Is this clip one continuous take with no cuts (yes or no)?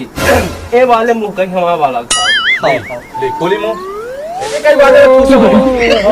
no